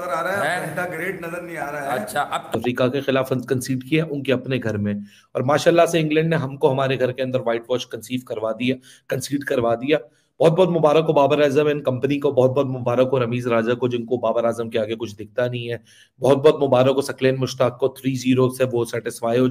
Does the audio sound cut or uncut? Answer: cut